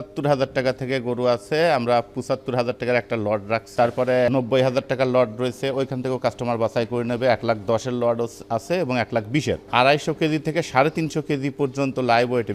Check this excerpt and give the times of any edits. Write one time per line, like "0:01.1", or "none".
0:03.8
0:09.7